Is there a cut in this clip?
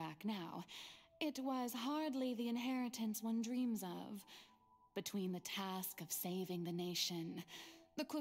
no; 0 cuts

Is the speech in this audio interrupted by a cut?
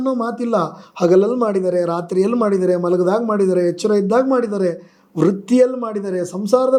no; 0 cuts

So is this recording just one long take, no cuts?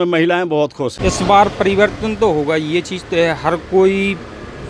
no; 1 cut; at 1.0 s

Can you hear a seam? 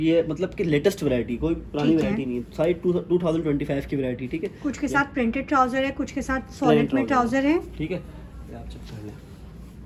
no; 0 cuts

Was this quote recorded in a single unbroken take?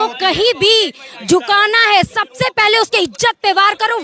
yes; 0 cuts

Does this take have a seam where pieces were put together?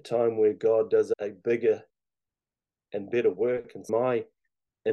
yes; 1 cut; at 3.9 s

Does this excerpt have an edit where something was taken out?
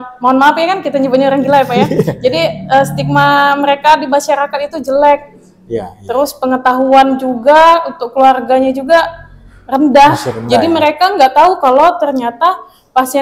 no; 0 cuts

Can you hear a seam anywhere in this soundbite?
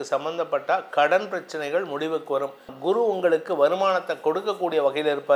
yes; 1 cut; at 2.7 s

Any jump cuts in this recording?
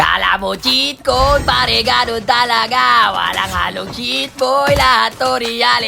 no; 0 cuts

